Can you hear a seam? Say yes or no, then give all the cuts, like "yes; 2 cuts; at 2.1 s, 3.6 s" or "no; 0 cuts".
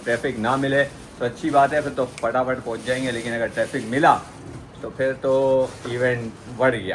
no; 0 cuts